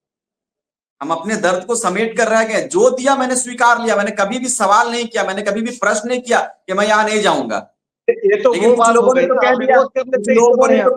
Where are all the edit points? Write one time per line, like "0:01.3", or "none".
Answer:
none